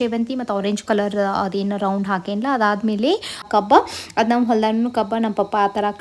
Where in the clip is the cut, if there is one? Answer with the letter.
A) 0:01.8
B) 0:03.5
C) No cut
B